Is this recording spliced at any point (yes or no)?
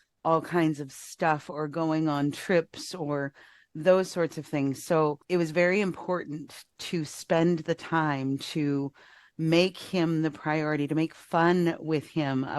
yes